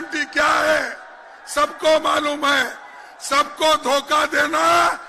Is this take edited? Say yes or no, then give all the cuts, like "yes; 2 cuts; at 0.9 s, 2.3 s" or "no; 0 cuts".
no; 0 cuts